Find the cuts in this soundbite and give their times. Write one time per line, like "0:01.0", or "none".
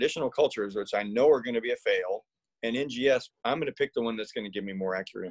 0:03.3